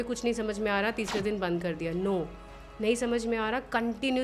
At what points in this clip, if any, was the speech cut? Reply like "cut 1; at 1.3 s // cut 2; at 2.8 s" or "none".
none